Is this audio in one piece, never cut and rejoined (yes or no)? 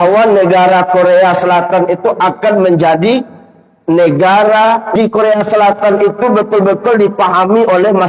no